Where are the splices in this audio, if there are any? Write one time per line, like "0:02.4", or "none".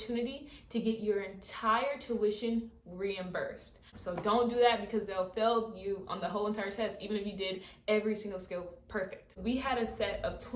0:03.9
0:09.4